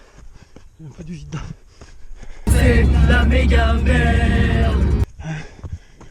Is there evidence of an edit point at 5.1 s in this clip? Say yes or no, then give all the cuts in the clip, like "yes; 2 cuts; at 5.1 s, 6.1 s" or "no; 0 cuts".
yes; 1 cut; at 5.1 s